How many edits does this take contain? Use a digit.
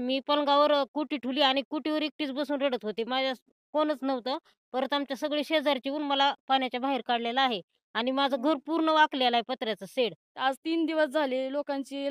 1